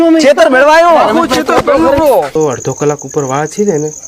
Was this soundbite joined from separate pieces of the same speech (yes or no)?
yes